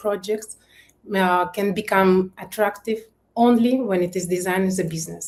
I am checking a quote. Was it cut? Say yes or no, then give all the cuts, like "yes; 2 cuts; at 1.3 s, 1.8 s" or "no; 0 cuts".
no; 0 cuts